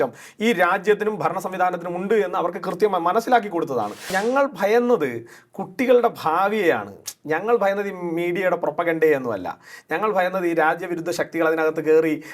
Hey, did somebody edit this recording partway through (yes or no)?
yes